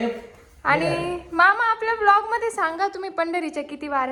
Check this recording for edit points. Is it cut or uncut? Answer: uncut